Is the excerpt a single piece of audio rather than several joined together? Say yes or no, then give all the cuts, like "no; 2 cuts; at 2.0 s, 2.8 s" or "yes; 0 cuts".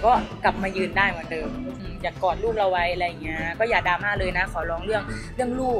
no; 1 cut; at 1.7 s